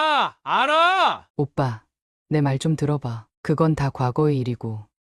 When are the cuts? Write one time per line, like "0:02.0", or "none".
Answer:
0:01.2